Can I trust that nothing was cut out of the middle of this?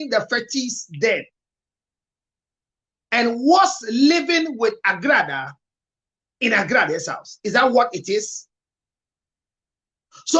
yes; 0 cuts

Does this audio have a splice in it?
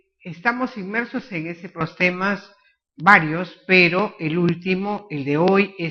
no; 0 cuts

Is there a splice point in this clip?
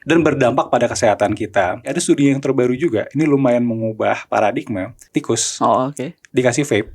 yes; 2 cuts; at 2.0 s, 5.1 s

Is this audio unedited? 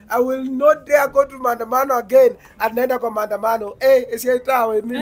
yes; 0 cuts

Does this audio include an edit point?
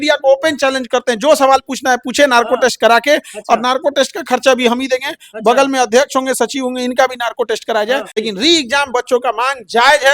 yes; 1 cut; at 8.2 s

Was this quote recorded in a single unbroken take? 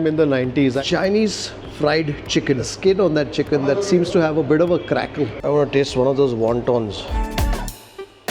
no; 2 cuts; at 0.8 s, 5.4 s

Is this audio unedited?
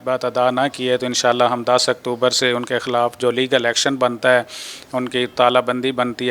yes; 0 cuts

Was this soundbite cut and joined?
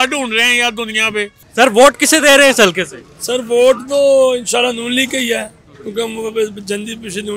no; 0 cuts

